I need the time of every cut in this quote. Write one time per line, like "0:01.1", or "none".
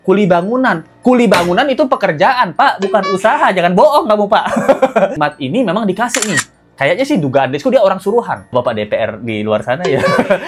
0:05.2
0:08.5